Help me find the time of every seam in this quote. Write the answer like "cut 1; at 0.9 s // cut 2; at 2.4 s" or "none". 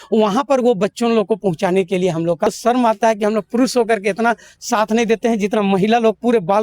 cut 1; at 2.5 s